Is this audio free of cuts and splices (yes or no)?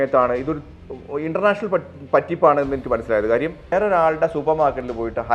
no